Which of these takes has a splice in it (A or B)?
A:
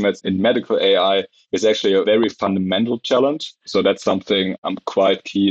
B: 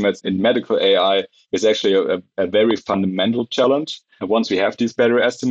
A